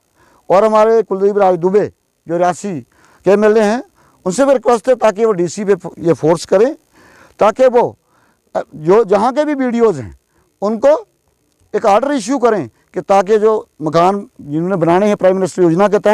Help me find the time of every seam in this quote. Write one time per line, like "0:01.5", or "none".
none

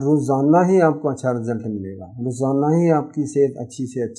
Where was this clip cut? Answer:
none

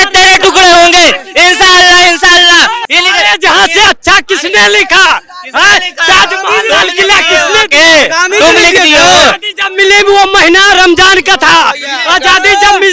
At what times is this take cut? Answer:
0:02.8

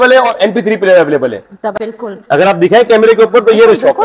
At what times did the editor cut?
0:01.7

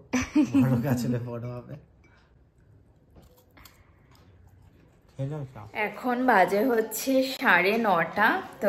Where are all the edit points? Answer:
none

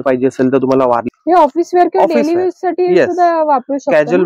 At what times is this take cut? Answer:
0:01.0

